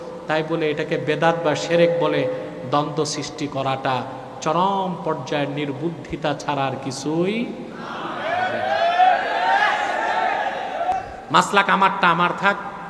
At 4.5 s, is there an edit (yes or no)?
no